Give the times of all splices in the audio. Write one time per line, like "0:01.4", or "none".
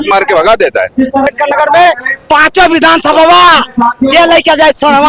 0:01.3